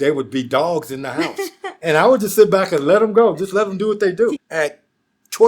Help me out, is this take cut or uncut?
cut